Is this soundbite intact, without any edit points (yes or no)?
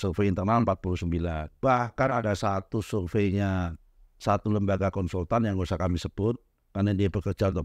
no